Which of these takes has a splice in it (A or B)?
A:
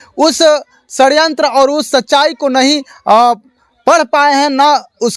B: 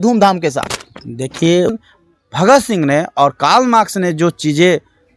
B